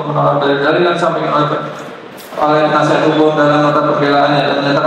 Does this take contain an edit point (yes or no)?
no